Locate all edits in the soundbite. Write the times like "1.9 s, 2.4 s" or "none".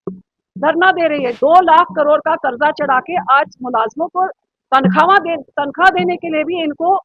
1.3 s